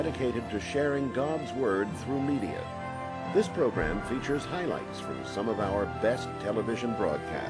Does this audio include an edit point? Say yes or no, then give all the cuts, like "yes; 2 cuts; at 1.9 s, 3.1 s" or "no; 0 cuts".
no; 0 cuts